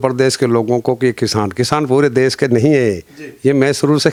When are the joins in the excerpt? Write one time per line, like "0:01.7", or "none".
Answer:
none